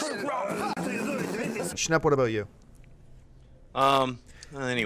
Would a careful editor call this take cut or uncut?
cut